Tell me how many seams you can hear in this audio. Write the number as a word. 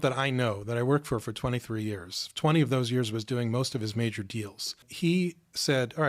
one